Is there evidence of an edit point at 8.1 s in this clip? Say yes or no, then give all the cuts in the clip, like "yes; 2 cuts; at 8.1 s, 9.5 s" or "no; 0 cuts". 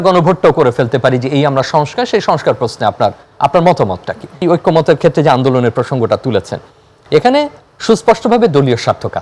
no; 1 cut; at 4.4 s